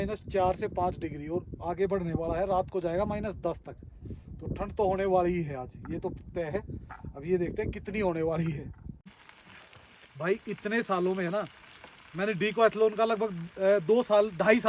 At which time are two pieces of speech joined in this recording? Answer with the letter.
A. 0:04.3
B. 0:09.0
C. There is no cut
B